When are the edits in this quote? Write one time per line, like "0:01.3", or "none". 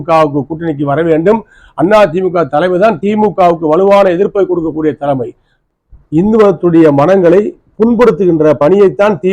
0:05.5